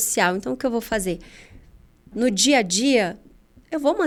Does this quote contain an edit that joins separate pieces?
no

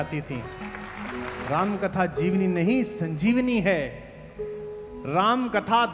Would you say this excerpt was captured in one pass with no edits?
no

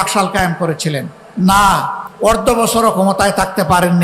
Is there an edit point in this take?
yes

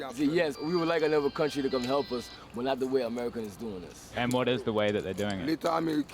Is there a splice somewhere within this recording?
yes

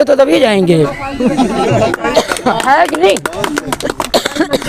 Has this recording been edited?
no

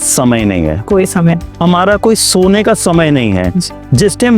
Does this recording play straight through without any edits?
yes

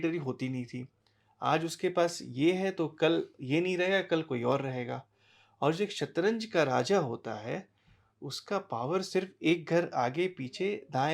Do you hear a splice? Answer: no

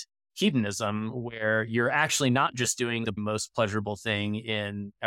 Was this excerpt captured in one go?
no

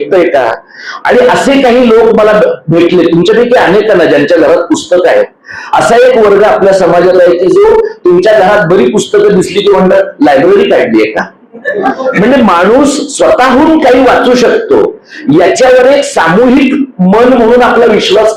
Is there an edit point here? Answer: no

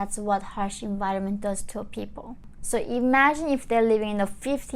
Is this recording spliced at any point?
yes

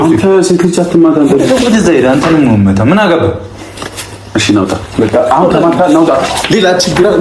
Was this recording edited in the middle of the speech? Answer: no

